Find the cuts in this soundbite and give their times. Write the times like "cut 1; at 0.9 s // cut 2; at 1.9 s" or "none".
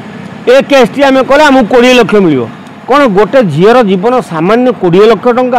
none